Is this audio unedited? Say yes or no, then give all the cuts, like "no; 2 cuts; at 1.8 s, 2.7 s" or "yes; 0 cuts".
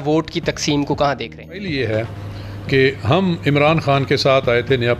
no; 1 cut; at 1.7 s